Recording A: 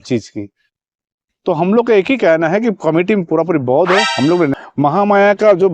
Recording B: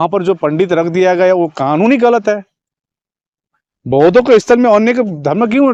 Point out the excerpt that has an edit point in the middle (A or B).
A